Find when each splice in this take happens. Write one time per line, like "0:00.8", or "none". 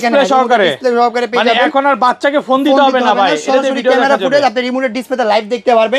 none